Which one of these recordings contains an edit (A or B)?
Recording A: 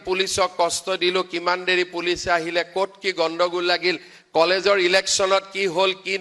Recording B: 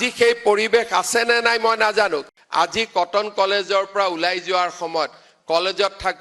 B